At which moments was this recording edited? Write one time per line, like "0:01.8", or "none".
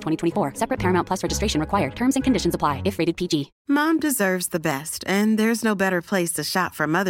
0:03.5